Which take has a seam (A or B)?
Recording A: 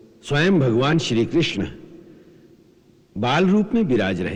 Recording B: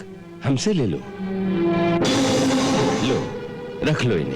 B